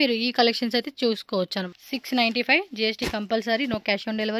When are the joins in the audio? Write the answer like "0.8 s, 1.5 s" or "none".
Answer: 1.8 s